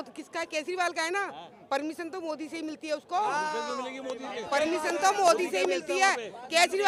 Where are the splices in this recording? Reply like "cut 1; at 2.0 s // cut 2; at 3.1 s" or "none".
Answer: none